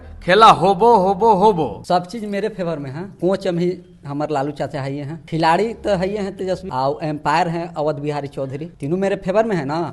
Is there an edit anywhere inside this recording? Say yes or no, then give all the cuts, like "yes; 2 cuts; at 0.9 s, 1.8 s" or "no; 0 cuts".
yes; 5 cuts; at 1.8 s, 3.0 s, 5.2 s, 6.7 s, 8.7 s